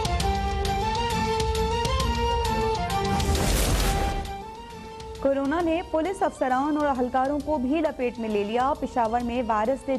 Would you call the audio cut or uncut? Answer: uncut